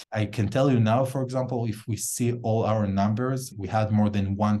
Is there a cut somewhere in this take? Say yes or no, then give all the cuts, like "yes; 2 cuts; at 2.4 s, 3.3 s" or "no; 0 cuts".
no; 0 cuts